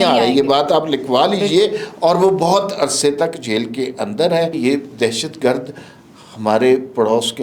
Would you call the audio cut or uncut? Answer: cut